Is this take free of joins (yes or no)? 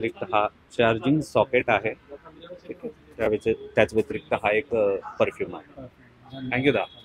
yes